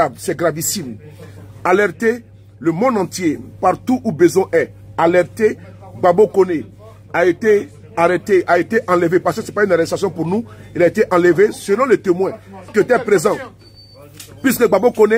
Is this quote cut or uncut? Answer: cut